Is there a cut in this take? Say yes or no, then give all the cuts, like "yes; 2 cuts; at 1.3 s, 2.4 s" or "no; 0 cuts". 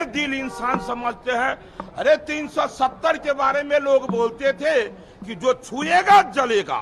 no; 0 cuts